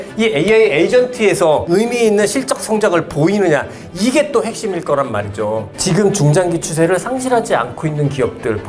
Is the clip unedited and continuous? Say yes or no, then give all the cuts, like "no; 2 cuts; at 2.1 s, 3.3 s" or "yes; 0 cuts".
no; 2 cuts; at 1.6 s, 5.7 s